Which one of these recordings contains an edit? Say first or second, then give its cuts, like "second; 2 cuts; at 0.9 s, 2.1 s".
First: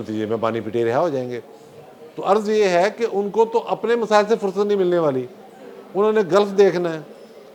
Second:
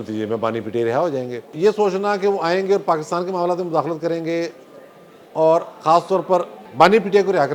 second; 2 cuts; at 1.5 s, 6.6 s